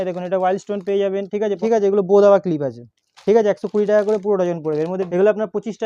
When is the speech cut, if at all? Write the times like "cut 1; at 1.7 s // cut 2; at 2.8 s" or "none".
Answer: cut 1; at 1.6 s // cut 2; at 5.0 s

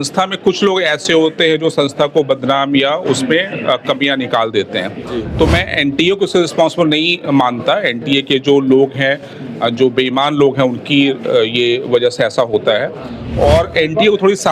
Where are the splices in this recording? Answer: none

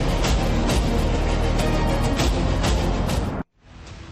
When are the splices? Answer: cut 1; at 3.2 s

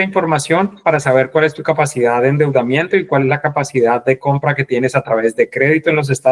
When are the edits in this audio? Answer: none

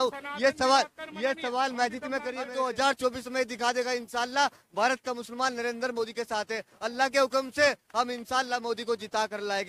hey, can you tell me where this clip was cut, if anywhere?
cut 1; at 2.4 s

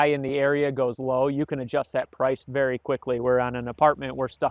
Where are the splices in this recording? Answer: none

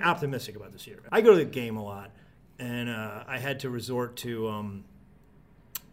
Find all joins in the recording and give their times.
cut 1; at 1.0 s

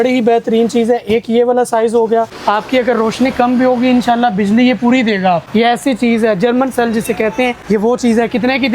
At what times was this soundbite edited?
cut 1; at 2.3 s // cut 2; at 5.4 s // cut 3; at 7.6 s

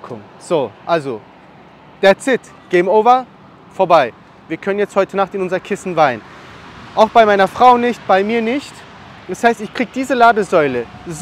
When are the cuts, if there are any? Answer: none

